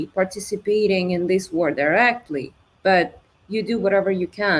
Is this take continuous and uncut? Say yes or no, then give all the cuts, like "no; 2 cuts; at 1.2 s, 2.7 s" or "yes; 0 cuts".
yes; 0 cuts